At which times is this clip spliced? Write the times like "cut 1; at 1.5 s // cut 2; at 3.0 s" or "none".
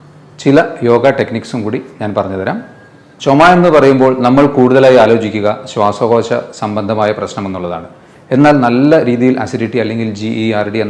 cut 1; at 3.1 s